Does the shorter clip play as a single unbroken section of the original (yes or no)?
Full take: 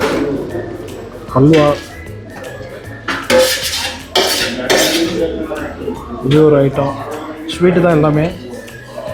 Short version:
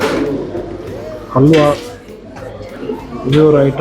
no